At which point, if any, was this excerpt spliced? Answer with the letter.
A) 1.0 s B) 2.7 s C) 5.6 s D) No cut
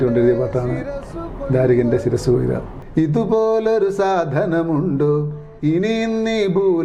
B